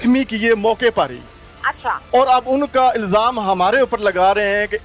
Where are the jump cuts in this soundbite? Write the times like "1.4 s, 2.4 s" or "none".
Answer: none